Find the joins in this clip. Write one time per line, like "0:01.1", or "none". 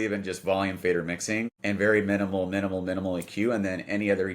0:01.5